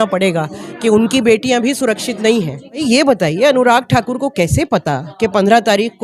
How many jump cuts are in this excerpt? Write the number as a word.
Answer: one